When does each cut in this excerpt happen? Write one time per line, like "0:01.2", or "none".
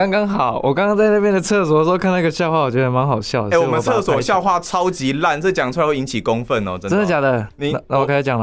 0:07.5